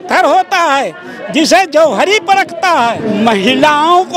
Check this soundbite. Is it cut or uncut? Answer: cut